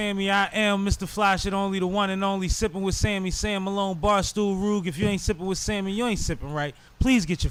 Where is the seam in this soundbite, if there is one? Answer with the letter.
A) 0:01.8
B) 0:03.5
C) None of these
C